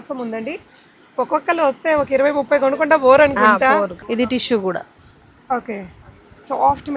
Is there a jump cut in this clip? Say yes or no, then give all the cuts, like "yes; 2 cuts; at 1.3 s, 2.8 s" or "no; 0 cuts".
yes; 1 cut; at 4.0 s